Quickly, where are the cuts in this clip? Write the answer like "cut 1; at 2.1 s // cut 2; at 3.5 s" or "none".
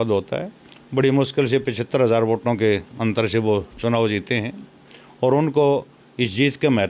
none